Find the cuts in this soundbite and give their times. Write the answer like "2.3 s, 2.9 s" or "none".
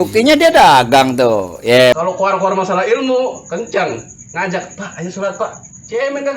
2.0 s